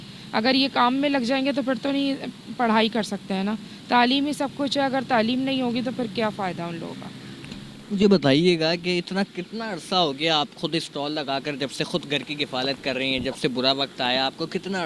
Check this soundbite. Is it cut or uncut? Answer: uncut